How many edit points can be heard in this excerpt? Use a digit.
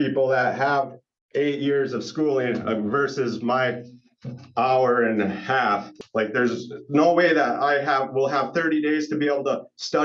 1